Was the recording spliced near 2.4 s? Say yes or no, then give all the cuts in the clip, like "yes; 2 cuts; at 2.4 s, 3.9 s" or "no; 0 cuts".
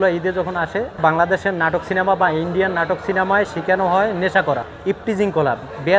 no; 2 cuts; at 0.9 s, 4.7 s